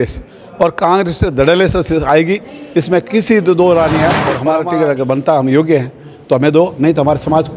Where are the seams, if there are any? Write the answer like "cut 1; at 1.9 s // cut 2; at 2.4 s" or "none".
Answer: cut 1; at 4.3 s